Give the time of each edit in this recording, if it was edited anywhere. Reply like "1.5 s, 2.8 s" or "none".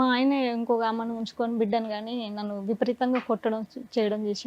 none